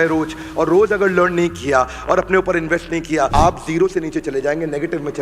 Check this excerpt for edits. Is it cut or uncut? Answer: cut